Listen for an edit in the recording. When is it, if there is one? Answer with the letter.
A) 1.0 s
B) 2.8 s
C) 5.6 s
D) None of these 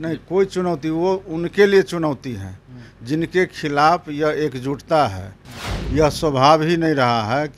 C